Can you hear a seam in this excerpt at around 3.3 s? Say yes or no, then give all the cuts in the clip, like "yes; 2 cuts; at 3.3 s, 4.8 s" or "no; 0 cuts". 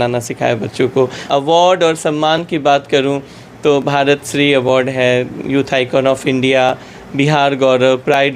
no; 1 cut; at 1.2 s